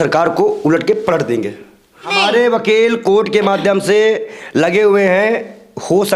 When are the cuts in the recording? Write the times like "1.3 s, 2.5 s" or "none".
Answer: none